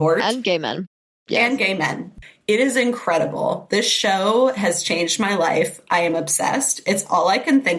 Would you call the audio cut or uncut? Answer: cut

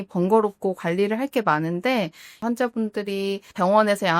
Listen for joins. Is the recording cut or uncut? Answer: cut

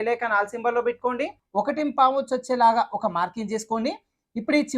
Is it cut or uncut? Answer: cut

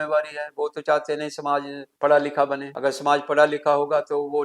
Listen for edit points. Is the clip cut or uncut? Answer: cut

